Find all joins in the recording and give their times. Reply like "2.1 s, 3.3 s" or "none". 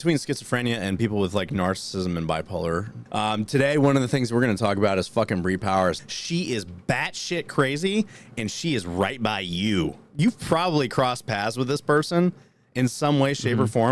3.0 s, 6.0 s, 10.1 s